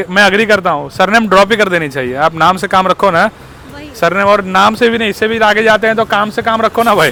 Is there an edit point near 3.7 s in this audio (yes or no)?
no